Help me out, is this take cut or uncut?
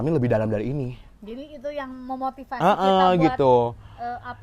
uncut